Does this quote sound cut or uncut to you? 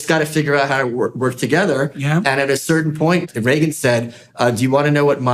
cut